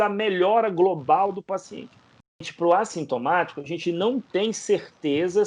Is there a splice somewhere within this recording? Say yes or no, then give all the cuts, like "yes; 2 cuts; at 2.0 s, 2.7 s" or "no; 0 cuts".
yes; 1 cut; at 2.5 s